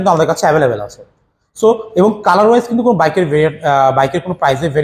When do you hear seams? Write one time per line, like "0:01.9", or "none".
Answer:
none